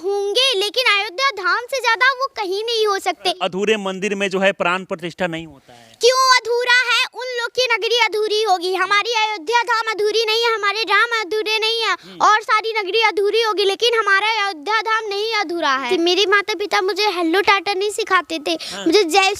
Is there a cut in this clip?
yes; 2 cuts; at 3.4 s, 15.9 s

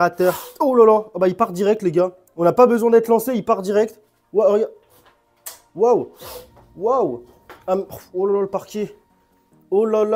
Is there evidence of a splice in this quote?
no; 0 cuts

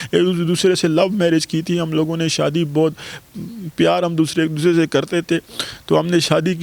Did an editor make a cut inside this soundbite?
no; 0 cuts

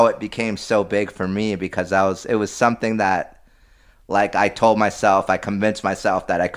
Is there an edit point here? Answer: no; 0 cuts

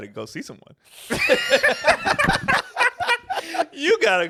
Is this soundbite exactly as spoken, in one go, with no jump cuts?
yes; 0 cuts

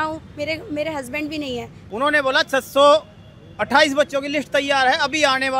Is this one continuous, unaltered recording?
no; 1 cut; at 1.7 s

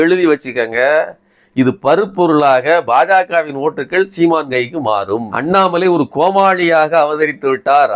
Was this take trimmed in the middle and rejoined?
yes; 1 cut; at 5.3 s

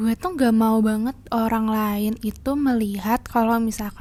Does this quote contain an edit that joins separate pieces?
no; 0 cuts

